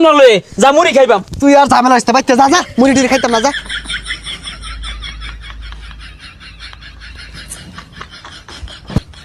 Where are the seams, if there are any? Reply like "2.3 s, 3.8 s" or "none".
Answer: 3.6 s